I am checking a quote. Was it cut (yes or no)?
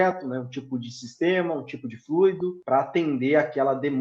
yes